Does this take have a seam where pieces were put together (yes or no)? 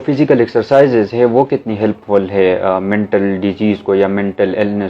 no